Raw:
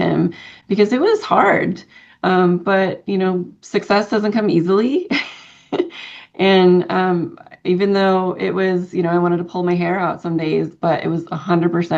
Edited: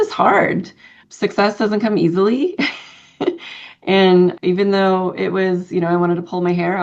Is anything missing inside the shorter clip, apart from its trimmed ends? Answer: yes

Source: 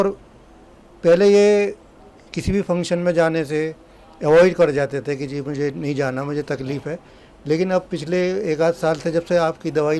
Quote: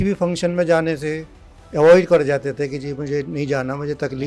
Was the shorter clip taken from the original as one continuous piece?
yes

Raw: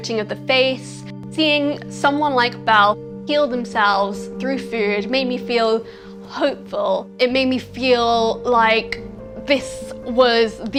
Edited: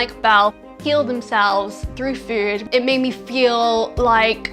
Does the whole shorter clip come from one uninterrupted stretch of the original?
no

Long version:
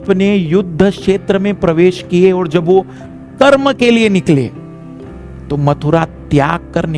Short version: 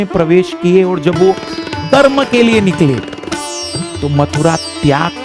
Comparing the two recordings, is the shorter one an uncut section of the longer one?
yes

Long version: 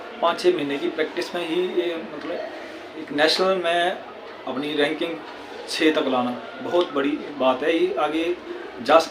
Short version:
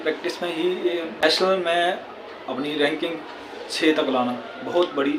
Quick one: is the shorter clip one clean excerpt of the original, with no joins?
no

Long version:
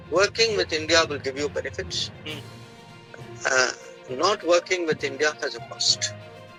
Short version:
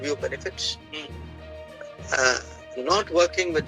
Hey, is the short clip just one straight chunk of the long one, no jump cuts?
yes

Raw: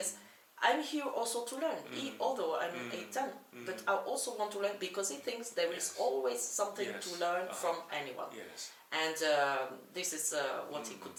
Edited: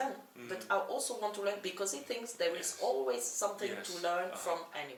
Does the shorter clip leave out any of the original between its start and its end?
no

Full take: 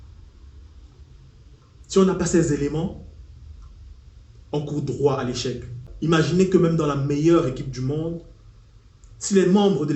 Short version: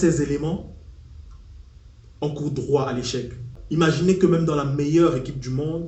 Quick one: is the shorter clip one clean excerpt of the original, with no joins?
yes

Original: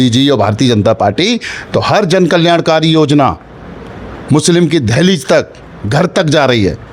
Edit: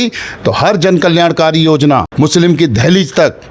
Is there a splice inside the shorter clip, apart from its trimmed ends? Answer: yes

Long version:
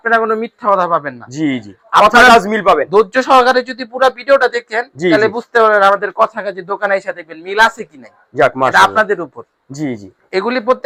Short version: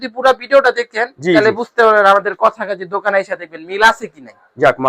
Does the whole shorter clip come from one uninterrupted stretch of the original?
yes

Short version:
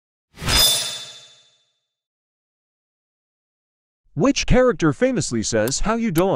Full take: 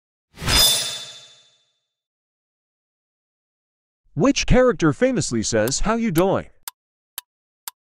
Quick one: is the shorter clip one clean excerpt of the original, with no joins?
yes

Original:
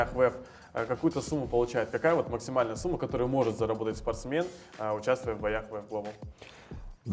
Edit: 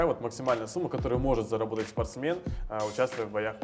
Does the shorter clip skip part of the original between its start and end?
no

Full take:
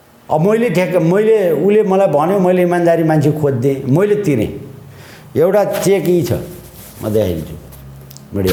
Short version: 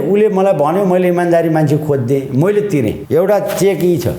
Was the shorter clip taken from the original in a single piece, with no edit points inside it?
no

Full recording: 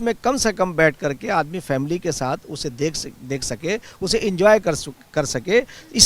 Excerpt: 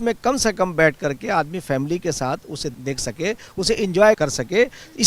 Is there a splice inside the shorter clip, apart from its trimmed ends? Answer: yes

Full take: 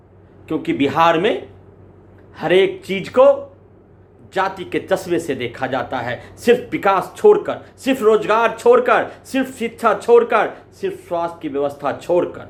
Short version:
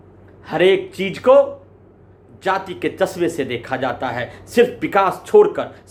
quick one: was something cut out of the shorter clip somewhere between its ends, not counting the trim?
no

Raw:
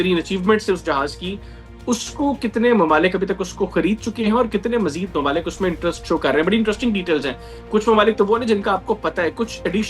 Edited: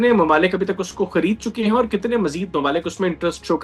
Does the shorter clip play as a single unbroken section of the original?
yes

